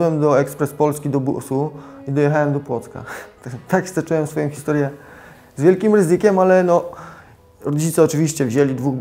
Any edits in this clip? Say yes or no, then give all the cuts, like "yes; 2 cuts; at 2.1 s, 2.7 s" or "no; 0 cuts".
no; 0 cuts